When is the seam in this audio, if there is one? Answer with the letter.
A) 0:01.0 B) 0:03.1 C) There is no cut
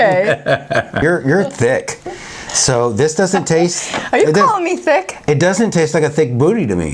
A